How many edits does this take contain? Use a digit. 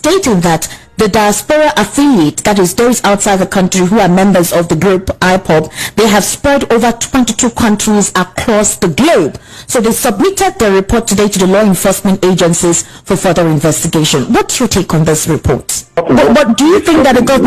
1